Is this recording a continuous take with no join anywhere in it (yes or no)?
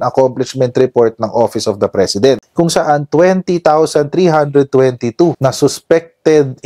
no